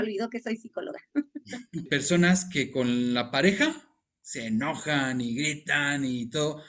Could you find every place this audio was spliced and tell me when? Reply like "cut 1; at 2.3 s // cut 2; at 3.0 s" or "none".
cut 1; at 1.8 s